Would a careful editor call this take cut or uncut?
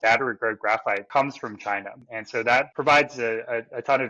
cut